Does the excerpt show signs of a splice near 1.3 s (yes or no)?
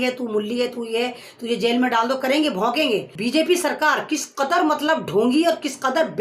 no